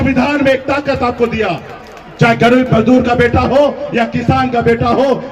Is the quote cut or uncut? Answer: uncut